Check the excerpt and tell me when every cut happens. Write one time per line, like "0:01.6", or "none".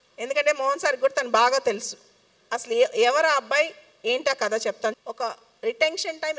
0:05.0